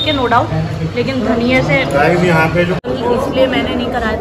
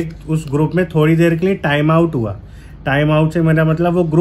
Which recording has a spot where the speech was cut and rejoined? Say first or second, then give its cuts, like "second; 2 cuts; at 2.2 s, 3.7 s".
first; 1 cut; at 2.8 s